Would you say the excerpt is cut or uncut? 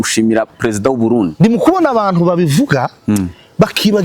cut